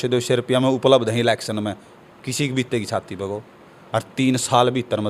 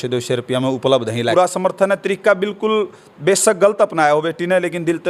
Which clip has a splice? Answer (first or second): second